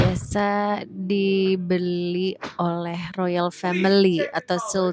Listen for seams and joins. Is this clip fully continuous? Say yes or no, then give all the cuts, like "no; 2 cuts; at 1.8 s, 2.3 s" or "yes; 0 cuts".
yes; 0 cuts